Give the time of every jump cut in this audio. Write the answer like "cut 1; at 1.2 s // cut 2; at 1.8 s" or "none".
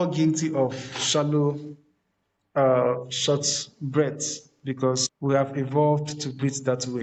none